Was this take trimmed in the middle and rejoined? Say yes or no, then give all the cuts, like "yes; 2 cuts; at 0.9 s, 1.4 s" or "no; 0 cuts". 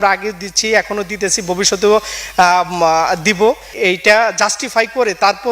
yes; 1 cut; at 3.7 s